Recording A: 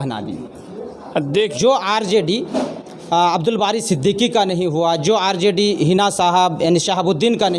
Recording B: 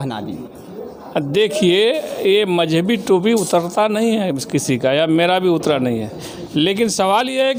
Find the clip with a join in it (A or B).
A